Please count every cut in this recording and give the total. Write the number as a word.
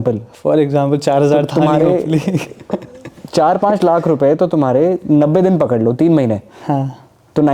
zero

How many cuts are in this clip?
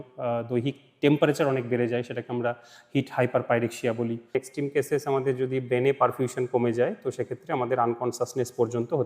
one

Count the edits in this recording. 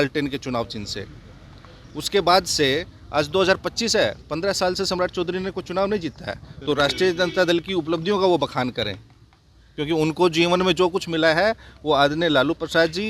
one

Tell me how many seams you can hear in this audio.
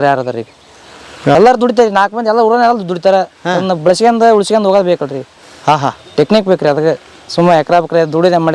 one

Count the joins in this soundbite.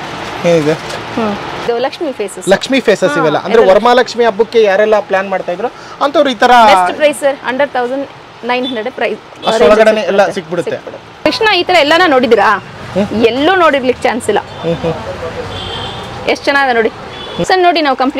three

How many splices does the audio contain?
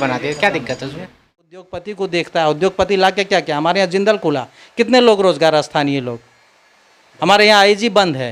one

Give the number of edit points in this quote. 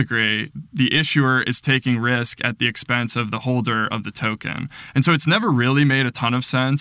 zero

